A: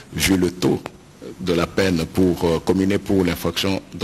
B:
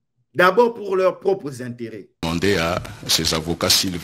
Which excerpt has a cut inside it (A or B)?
B